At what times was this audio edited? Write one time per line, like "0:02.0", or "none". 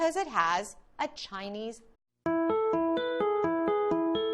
none